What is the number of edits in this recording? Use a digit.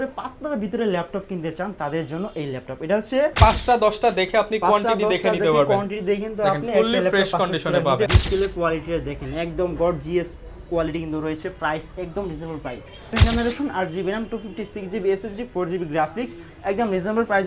3